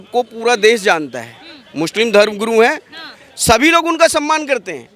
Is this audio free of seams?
yes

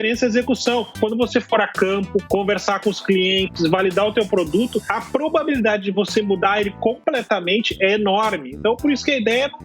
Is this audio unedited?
no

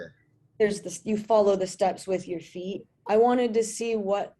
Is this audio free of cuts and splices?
no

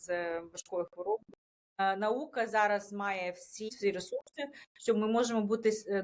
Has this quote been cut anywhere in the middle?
yes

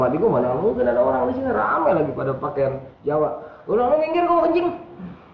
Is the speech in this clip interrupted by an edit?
no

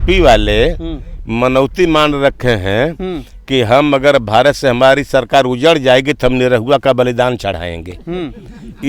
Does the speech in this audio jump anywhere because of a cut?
no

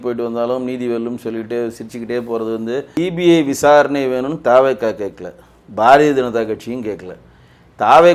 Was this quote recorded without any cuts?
no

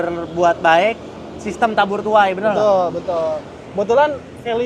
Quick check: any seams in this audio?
no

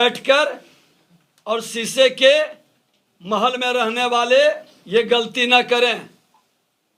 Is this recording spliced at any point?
no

